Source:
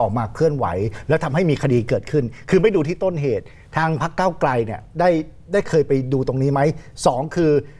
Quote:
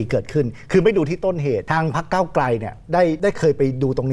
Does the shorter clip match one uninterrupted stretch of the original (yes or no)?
no